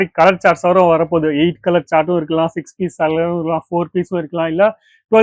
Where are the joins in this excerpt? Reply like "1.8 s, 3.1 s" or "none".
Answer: none